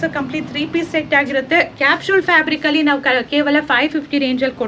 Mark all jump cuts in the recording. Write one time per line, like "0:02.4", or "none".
none

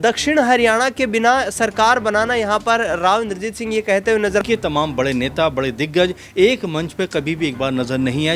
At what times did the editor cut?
0:04.4

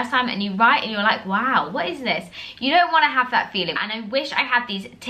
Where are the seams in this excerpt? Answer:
0:03.8

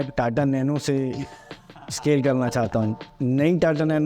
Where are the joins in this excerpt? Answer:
0:03.0

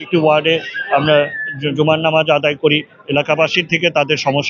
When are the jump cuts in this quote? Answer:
none

